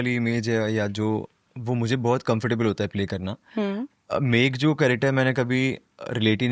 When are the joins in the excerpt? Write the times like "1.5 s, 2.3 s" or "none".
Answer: none